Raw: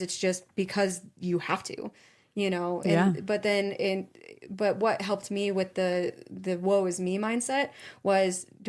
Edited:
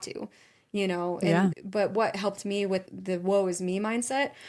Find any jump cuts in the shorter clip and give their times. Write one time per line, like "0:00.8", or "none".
0:01.6
0:02.9